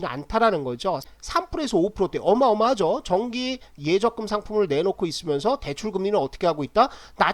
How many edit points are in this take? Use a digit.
1